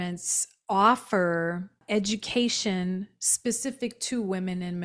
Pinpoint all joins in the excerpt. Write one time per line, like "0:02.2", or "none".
0:01.8